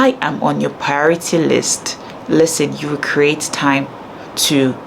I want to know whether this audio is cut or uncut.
uncut